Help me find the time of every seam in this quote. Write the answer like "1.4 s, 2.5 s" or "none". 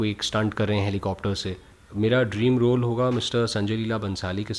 1.7 s